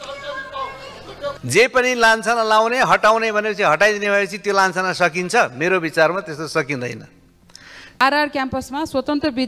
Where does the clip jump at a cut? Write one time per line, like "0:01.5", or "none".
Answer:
0:01.3
0:08.0